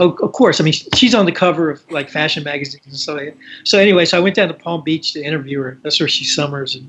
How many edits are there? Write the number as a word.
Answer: zero